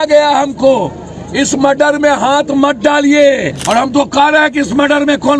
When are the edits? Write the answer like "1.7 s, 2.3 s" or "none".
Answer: 3.6 s